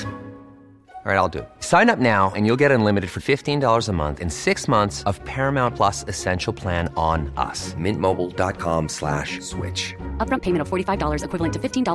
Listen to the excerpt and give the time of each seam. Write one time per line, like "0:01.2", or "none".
none